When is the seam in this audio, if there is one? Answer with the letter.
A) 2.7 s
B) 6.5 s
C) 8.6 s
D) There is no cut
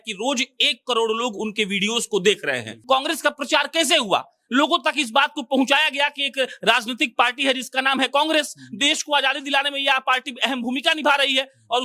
A